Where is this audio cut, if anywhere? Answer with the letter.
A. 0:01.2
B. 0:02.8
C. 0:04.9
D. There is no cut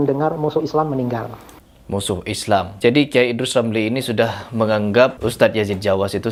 D